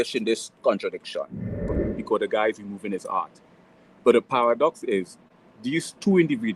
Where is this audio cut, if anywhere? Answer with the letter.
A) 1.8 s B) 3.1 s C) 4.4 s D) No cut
A